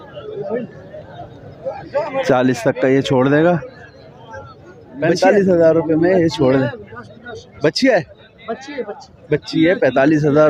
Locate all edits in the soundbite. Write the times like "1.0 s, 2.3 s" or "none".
5.0 s